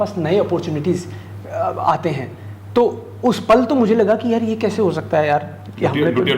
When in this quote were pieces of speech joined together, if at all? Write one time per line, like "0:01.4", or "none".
none